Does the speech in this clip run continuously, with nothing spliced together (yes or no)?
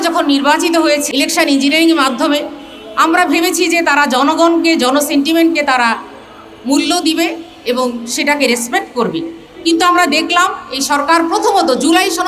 no